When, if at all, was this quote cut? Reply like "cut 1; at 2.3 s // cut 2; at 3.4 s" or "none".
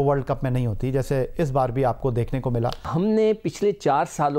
cut 1; at 2.8 s